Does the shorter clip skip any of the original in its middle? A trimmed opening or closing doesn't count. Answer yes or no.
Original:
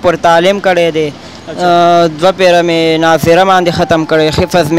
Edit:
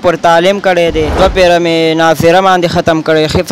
yes